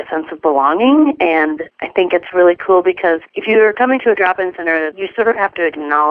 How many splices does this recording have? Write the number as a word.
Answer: zero